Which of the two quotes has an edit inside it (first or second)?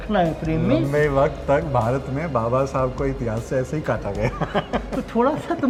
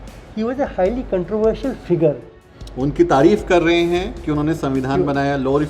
second